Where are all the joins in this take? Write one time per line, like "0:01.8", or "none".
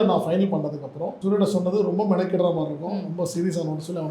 0:01.1